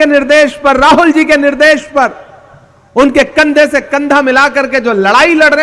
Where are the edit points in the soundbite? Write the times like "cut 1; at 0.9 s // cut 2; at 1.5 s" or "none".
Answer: none